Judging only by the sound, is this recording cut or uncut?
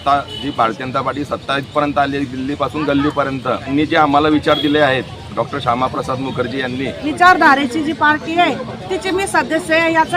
cut